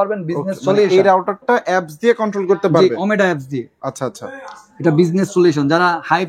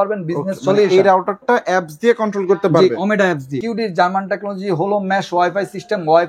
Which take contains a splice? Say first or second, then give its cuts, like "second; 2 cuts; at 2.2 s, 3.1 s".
second; 1 cut; at 3.6 s